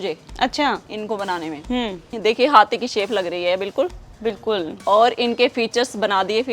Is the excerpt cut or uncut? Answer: cut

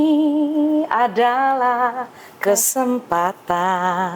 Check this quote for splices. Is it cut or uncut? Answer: uncut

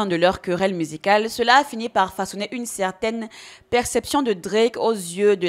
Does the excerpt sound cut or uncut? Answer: uncut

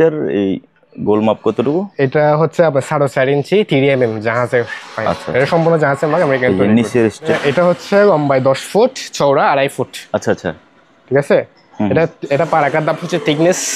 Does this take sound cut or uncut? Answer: cut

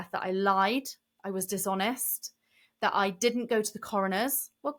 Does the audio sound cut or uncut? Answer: uncut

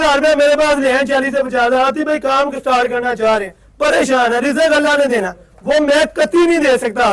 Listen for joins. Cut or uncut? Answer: uncut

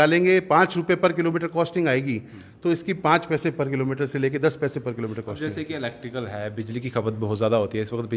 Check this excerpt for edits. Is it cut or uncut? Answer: uncut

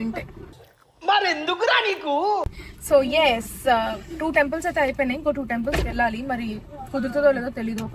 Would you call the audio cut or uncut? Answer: uncut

